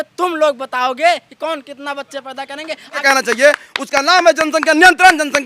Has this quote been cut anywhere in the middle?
yes; 1 cut; at 3.0 s

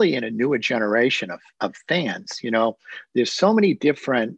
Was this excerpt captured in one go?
yes; 0 cuts

